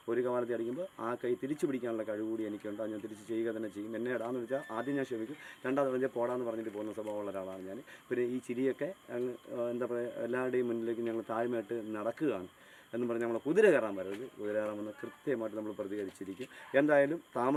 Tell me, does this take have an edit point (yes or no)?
no